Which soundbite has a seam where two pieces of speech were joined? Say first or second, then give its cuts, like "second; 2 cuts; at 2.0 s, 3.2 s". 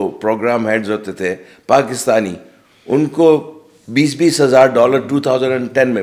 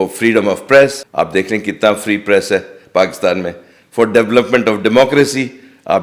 second; 1 cut; at 1.0 s